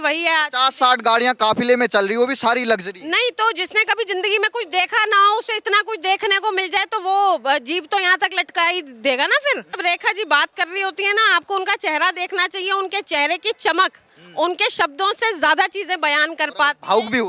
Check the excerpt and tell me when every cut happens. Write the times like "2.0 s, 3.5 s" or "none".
9.8 s